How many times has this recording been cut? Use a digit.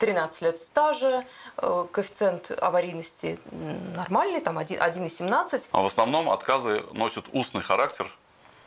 1